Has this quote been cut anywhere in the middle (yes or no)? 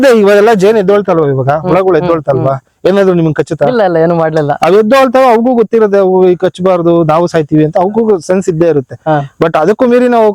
no